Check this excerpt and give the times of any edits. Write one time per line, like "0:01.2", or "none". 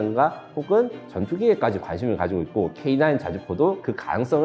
none

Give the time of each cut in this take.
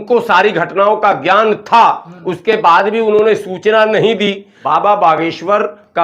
0:04.5

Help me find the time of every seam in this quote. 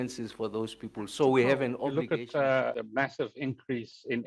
0:01.9

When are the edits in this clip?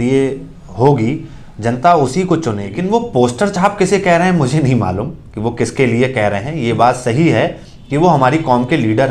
0:02.8

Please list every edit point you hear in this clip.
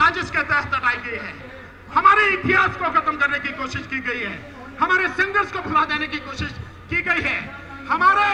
none

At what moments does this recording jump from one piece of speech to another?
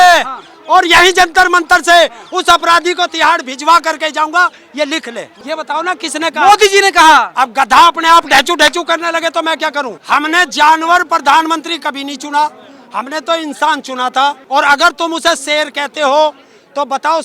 0:05.3
0:10.0
0:14.4

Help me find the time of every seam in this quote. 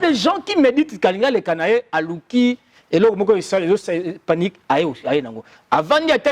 none

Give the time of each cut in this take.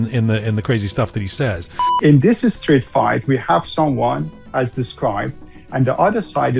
0:01.9

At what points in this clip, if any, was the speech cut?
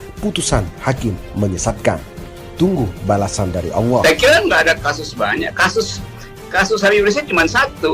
0:04.0

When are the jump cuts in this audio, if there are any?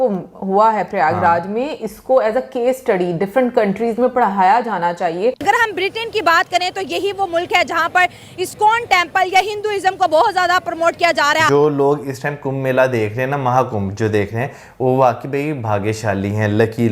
0:05.4
0:11.5

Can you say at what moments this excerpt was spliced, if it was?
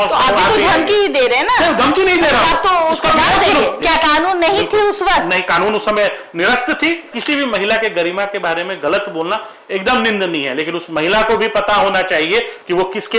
0:03.8
0:07.1

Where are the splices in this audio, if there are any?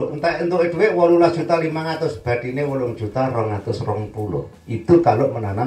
0:04.6

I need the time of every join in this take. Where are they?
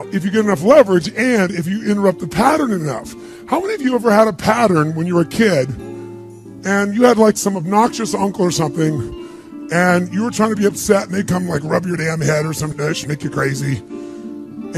0:02.9

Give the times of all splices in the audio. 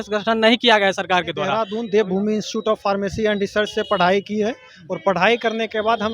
0:01.6

